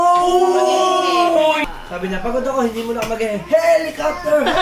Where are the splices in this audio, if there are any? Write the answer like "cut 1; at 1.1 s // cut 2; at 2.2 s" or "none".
cut 1; at 1.6 s